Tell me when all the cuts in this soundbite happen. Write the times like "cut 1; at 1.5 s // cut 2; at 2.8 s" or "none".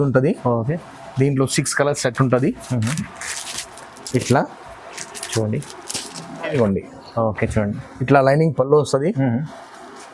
cut 1; at 6.5 s